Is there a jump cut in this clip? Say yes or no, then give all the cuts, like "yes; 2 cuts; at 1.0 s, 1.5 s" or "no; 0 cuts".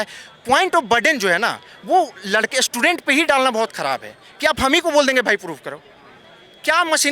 no; 0 cuts